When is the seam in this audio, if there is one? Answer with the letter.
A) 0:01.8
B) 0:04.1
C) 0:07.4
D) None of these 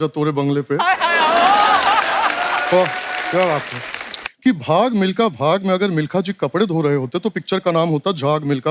B